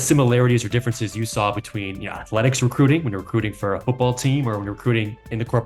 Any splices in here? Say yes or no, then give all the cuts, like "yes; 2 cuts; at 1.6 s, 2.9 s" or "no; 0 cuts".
no; 0 cuts